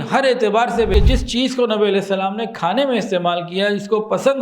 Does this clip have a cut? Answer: yes; 1 cut; at 0.9 s

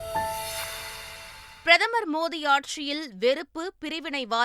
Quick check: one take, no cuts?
yes; 0 cuts

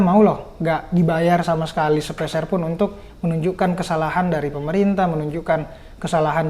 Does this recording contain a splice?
no; 0 cuts

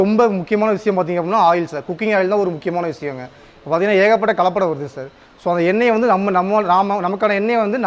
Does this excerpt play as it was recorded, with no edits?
yes; 0 cuts

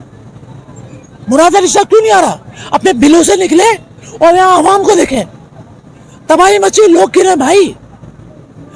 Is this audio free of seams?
yes; 0 cuts

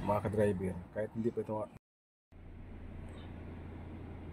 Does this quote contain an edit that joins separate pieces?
yes; 1 cut; at 1.7 s

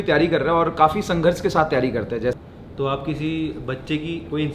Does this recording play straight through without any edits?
no; 1 cut; at 2.3 s

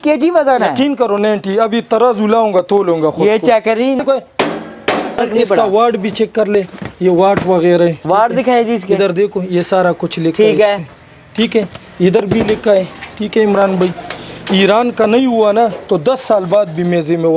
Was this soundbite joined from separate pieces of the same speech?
no; 0 cuts

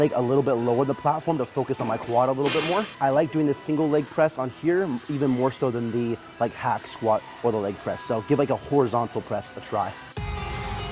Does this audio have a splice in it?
no; 0 cuts

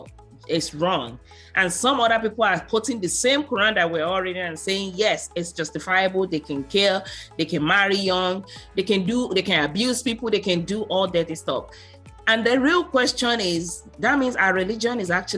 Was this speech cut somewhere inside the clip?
no; 0 cuts

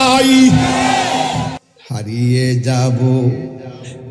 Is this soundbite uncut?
no; 1 cut; at 1.7 s

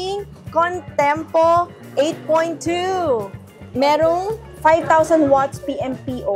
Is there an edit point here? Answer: no; 0 cuts

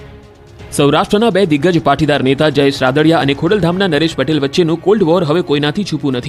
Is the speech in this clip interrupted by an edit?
no; 0 cuts

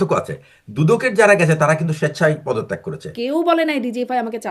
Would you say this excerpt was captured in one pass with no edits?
no; 1 cut; at 3.1 s

